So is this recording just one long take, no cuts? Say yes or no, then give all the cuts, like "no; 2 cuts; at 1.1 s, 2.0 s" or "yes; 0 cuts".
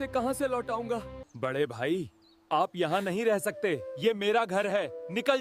no; 1 cut; at 1.2 s